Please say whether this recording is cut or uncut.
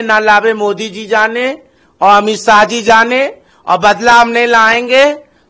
uncut